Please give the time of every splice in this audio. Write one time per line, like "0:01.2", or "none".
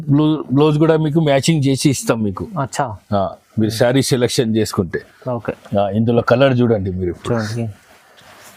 none